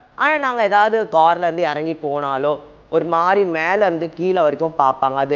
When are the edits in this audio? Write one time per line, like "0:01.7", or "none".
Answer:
0:01.1